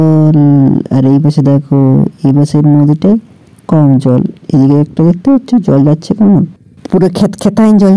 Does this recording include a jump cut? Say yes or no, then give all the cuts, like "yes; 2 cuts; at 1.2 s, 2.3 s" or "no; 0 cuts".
no; 0 cuts